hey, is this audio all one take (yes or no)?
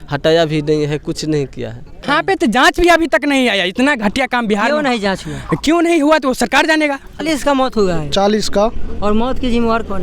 no